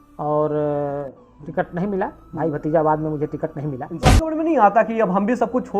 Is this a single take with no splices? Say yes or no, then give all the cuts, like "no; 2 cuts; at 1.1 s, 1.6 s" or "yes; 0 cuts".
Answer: no; 1 cut; at 4.2 s